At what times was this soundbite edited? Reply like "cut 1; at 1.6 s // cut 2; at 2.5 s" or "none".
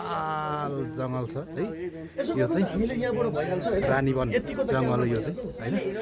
none